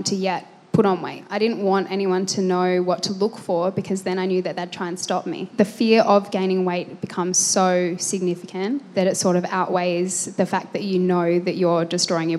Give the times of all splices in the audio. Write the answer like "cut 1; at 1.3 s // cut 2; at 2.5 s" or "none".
cut 1; at 1.2 s // cut 2; at 5.5 s